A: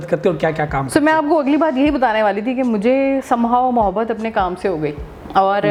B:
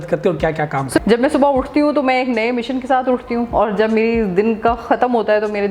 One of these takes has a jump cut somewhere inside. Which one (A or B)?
B